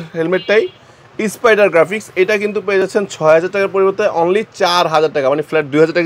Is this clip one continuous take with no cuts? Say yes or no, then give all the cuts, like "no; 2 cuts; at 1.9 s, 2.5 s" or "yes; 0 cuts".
yes; 0 cuts